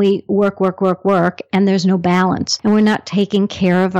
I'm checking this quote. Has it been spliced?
yes; 1 cut; at 2.5 s

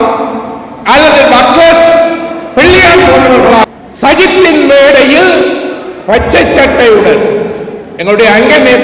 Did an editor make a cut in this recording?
yes; 1 cut; at 3.6 s

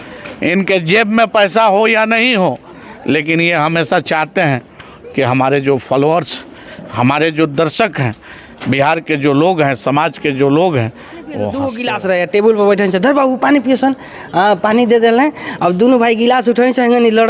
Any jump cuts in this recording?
yes; 1 cut; at 11.6 s

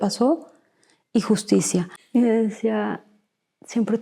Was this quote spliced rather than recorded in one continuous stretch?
yes; 1 cut; at 2.0 s

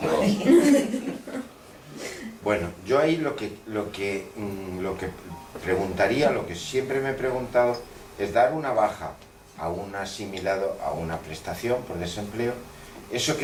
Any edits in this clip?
no; 0 cuts

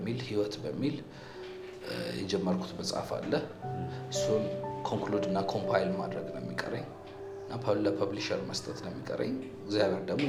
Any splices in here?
no; 0 cuts

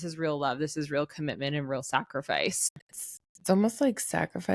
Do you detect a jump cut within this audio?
yes; 1 cut; at 2.7 s

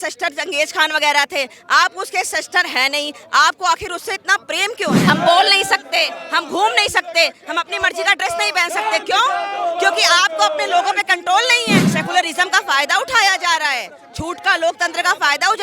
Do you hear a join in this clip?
yes; 2 cuts; at 5.0 s, 11.8 s

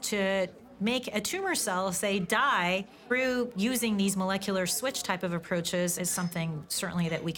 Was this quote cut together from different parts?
no; 0 cuts

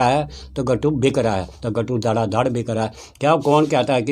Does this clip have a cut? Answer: yes; 1 cut; at 1.6 s

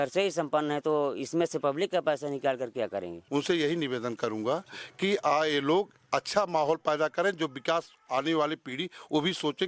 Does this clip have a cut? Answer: yes; 1 cut; at 3.2 s

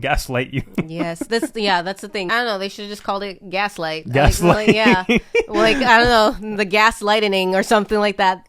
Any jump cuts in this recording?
yes; 1 cut; at 2.3 s

